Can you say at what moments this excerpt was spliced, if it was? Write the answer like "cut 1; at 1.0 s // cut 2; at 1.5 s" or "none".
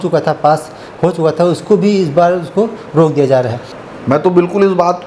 cut 1; at 3.6 s